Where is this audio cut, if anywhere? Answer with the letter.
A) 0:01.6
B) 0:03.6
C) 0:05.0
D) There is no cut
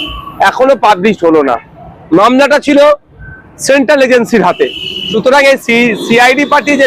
C